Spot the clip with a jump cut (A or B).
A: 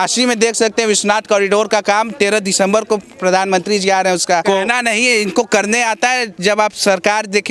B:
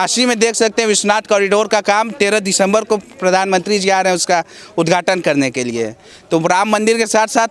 A